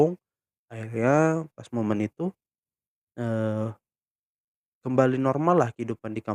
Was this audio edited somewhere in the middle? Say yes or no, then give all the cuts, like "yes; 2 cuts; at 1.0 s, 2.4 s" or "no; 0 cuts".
no; 0 cuts